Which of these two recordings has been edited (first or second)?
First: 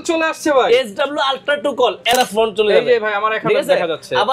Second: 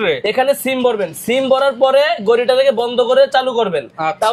first